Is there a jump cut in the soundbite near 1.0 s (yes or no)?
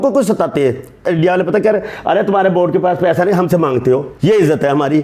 yes